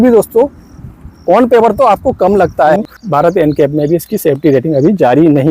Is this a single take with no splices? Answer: no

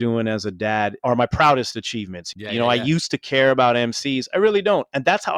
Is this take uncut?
no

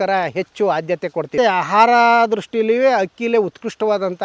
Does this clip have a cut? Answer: yes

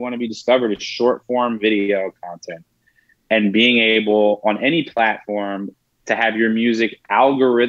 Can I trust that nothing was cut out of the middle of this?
yes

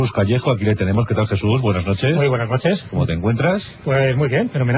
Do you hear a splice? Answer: no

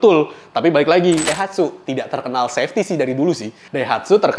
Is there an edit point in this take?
yes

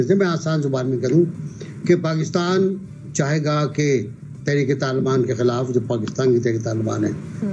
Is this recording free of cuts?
yes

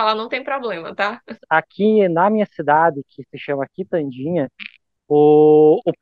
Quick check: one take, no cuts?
no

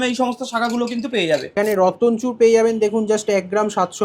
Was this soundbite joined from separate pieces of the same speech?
yes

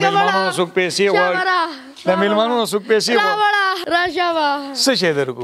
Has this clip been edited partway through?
yes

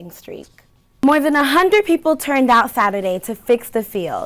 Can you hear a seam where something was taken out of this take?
yes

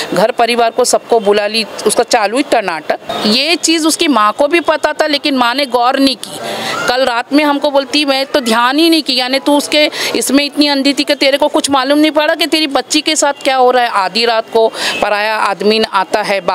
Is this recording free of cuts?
no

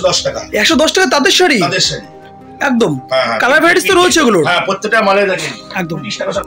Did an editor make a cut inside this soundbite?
no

